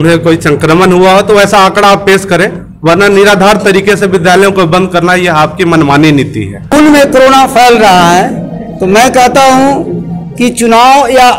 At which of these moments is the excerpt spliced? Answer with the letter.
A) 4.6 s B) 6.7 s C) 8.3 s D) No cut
B